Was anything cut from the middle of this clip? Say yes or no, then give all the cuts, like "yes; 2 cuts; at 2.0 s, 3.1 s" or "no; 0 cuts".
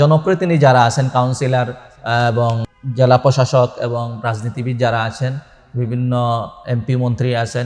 yes; 1 cut; at 2.6 s